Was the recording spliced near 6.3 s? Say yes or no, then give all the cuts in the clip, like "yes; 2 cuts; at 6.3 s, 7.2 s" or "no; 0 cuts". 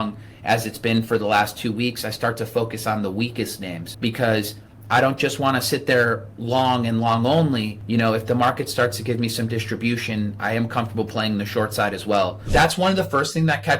no; 3 cuts; at 3.8 s, 7.8 s, 12.5 s